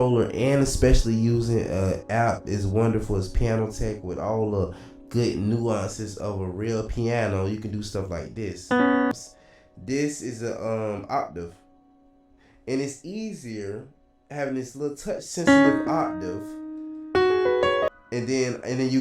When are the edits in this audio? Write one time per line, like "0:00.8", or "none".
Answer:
0:09.1
0:17.9